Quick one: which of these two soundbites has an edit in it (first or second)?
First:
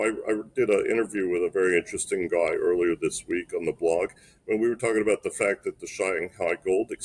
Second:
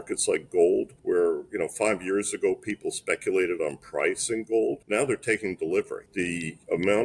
second